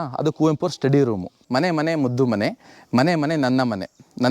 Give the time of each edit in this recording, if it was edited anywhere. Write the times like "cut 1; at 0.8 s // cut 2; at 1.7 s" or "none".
cut 1; at 1.4 s